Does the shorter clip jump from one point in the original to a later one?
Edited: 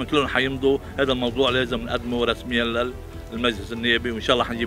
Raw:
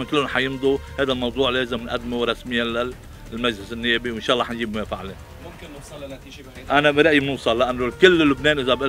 no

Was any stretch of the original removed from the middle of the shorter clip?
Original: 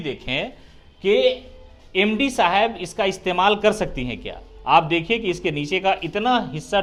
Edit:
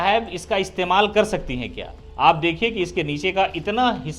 no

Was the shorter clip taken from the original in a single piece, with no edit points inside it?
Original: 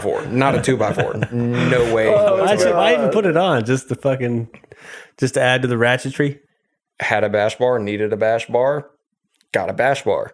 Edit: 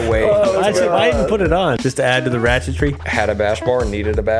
no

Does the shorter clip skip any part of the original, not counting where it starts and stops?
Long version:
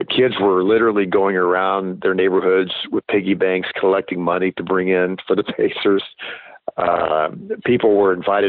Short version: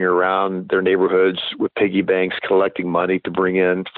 no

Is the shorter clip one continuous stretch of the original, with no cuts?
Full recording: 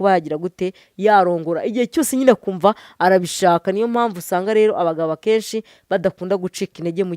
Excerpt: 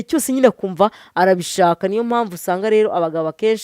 yes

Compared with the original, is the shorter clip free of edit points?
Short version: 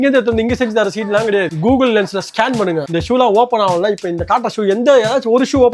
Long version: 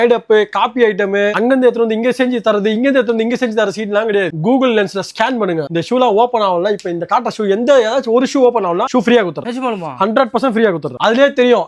yes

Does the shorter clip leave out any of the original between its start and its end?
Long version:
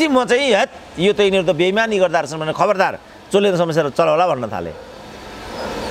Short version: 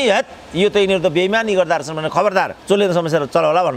yes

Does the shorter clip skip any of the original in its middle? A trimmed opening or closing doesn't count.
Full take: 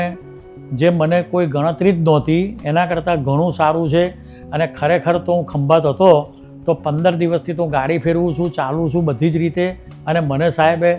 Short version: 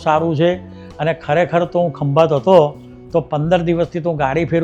no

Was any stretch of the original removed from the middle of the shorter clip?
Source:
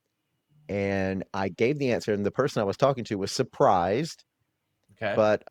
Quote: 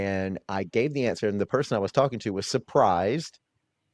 no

